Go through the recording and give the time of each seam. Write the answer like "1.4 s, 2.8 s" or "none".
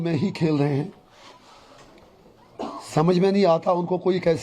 none